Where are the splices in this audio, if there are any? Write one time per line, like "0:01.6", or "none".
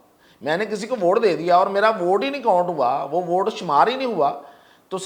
none